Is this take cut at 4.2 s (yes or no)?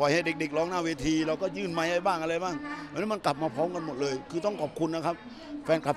no